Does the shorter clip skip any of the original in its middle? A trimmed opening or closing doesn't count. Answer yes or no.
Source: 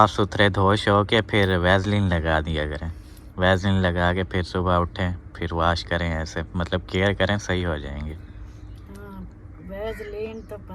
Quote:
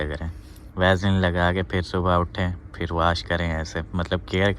no